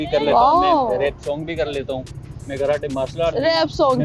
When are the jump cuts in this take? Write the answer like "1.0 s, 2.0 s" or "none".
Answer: none